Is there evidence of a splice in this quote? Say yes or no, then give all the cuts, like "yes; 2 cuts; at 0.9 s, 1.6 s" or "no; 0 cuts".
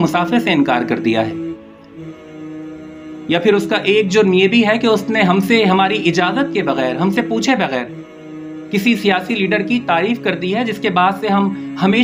no; 0 cuts